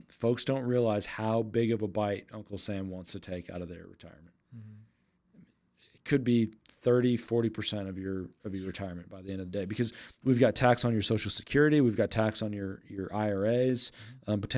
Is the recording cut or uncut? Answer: uncut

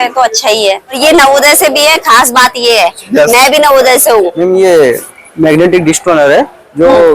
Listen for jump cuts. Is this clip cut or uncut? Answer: cut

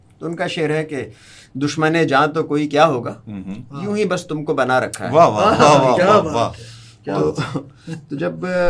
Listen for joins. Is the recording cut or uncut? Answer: uncut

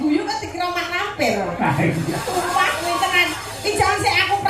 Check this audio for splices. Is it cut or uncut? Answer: cut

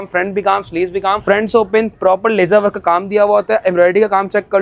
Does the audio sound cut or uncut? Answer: cut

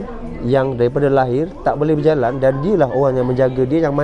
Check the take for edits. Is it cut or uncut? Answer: uncut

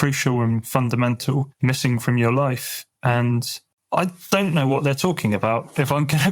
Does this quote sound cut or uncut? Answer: uncut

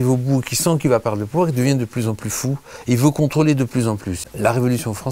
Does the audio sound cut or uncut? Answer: cut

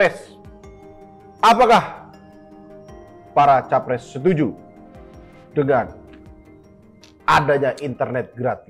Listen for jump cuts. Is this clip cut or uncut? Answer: uncut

